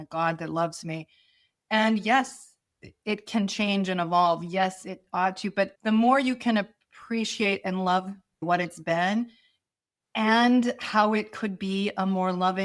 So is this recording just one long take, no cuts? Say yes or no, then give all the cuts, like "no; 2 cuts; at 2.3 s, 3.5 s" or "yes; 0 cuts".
no; 1 cut; at 5.8 s